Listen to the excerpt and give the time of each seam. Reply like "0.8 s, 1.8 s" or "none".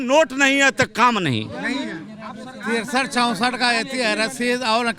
none